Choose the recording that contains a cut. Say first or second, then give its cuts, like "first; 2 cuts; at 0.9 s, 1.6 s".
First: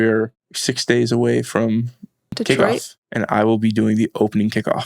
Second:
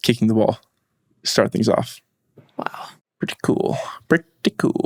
first; 1 cut; at 2.3 s